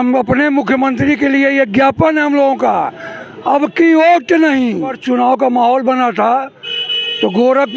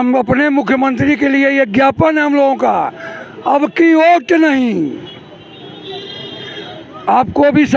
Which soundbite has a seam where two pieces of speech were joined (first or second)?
first